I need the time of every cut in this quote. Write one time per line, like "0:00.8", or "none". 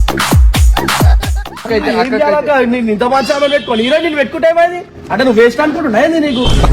0:01.6